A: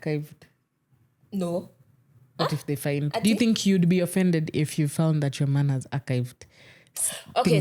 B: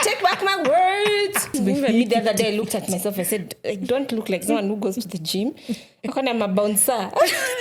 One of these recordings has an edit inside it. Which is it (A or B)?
B